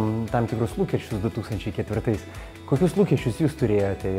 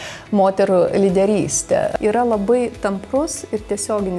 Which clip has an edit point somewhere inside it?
second; 1 cut; at 1.9 s

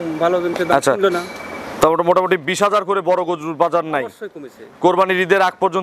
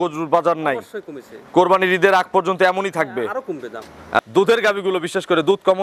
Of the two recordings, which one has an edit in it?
second; 1 cut; at 4.2 s

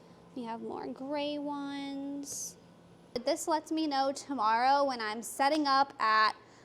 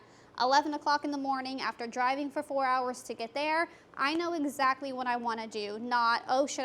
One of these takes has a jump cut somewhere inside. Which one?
first; 1 cut; at 3.2 s

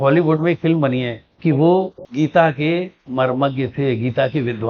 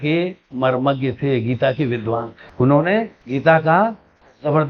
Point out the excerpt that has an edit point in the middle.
first; 1 cut; at 1.2 s

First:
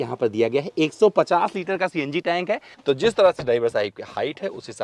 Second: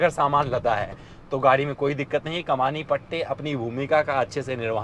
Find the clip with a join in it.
first; 1 cut; at 2.7 s

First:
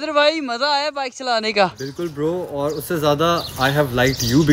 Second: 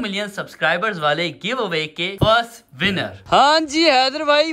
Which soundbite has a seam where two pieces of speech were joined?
second; 1 cut; at 3.2 s

